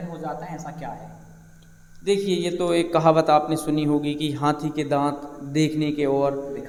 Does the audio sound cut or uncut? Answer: uncut